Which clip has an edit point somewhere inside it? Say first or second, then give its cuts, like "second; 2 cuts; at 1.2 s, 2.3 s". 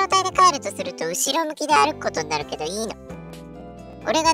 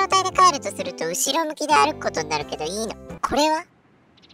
second; 1 cut; at 3.1 s